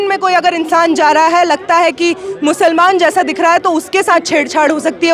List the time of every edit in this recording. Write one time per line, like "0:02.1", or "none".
none